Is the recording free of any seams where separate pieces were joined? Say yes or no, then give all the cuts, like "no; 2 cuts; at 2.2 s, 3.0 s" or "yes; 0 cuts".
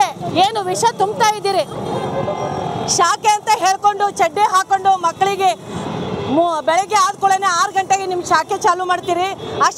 yes; 0 cuts